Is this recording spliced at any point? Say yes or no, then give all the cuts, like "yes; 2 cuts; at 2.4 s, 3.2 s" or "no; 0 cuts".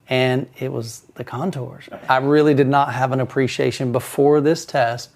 yes; 1 cut; at 2.0 s